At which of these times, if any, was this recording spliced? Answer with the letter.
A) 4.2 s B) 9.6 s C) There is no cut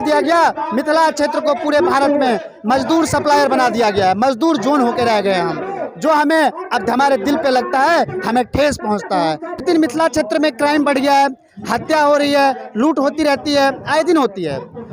B